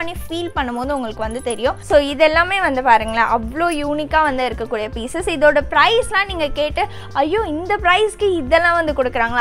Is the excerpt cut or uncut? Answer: cut